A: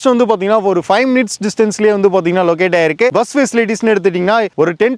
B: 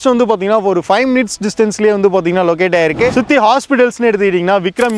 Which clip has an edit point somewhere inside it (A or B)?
B